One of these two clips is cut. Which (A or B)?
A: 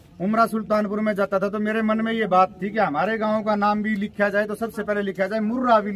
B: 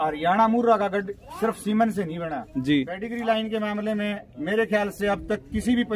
B